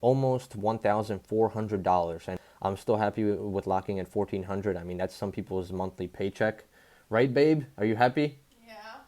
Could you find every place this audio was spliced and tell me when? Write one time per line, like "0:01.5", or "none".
0:02.4